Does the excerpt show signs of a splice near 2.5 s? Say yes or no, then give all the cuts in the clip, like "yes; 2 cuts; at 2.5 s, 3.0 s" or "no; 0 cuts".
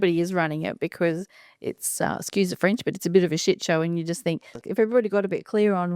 no; 1 cut; at 4.6 s